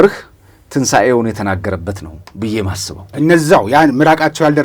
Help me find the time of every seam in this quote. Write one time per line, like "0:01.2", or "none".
0:03.1